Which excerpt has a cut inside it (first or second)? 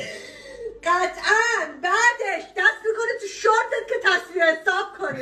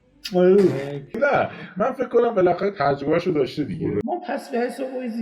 second